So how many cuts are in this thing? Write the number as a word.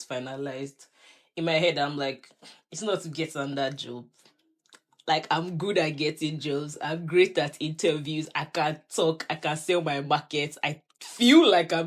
zero